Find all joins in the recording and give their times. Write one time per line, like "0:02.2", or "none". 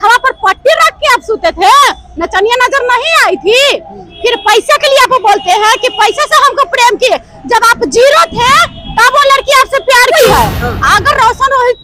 0:10.1